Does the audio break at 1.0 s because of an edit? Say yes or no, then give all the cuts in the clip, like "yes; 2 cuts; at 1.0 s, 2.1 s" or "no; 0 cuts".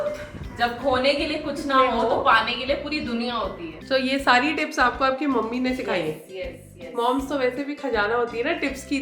no; 1 cut; at 3.7 s